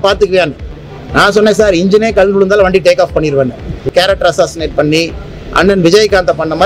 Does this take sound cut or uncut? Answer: cut